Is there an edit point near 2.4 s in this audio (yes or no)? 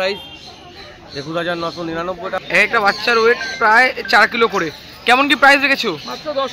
yes